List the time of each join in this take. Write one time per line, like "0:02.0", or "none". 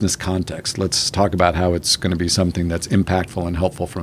none